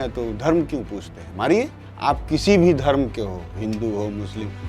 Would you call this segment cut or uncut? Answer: cut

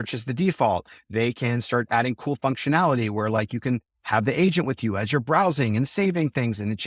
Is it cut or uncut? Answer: uncut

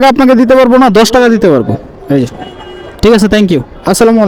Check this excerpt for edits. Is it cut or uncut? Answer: uncut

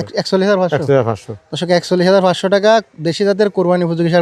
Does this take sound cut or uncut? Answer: uncut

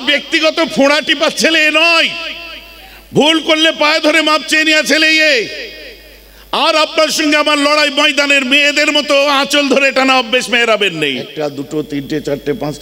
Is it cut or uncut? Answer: cut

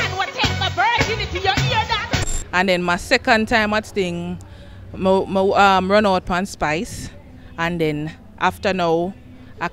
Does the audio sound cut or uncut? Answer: cut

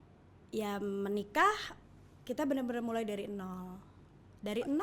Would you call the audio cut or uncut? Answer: uncut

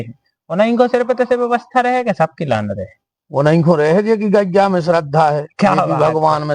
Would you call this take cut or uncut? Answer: uncut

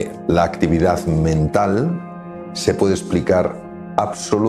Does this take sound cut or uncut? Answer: uncut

